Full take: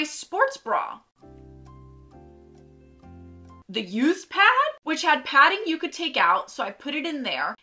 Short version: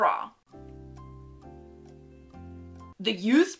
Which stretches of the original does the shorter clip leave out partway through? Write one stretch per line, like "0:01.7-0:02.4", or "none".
none